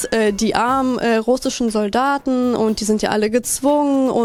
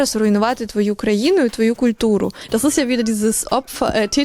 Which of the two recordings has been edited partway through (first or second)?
second